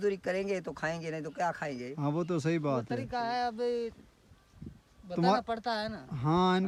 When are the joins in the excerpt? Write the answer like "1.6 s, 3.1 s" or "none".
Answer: none

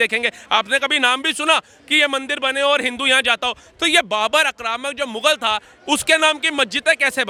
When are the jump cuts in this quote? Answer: none

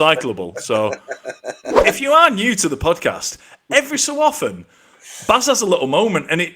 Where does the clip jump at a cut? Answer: 1.8 s

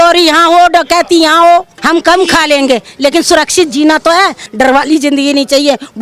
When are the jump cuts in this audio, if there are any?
1.8 s, 4.4 s

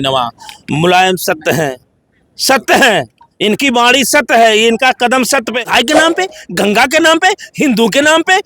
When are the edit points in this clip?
5.6 s

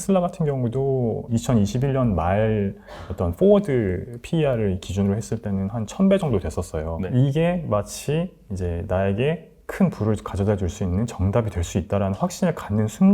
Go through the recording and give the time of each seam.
1.3 s, 7.0 s

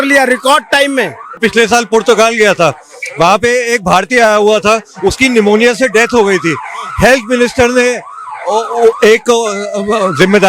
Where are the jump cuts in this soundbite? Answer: 1.4 s

